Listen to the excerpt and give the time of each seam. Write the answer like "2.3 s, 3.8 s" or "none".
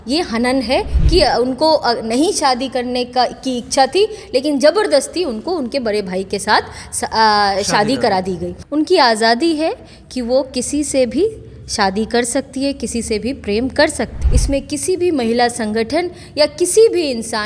8.5 s, 14.3 s